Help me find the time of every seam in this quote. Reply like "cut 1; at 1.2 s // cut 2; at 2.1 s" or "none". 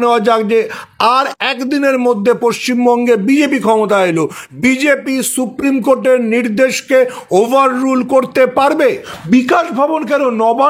cut 1; at 9.1 s